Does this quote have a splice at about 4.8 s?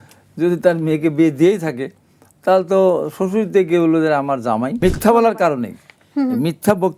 yes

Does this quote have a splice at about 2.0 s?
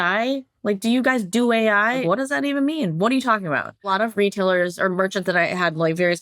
yes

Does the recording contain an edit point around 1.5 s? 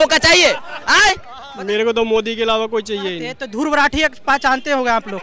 yes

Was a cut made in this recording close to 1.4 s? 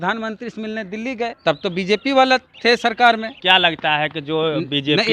yes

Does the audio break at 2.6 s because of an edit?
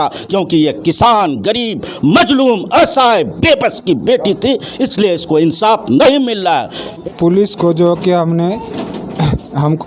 no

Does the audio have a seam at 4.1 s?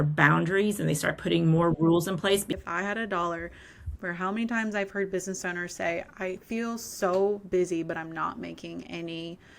no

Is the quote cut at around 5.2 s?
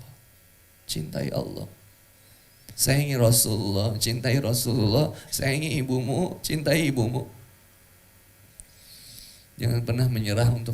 no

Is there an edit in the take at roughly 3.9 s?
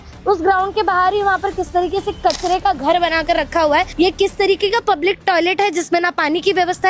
yes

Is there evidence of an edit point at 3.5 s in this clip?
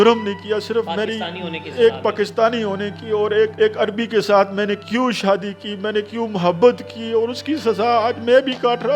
yes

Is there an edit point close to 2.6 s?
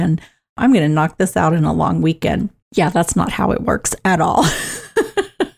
yes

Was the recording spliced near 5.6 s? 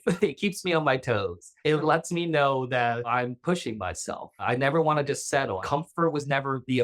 yes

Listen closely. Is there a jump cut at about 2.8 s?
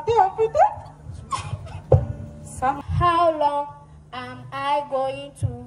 yes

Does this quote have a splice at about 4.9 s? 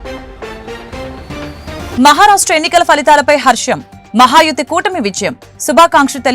no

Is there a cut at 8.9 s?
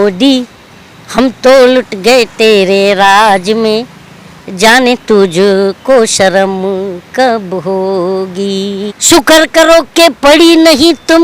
yes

